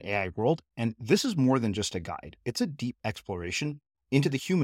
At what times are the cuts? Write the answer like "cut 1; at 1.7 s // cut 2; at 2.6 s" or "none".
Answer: none